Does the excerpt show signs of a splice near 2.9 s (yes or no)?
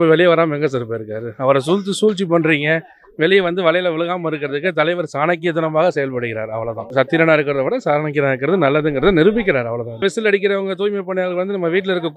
no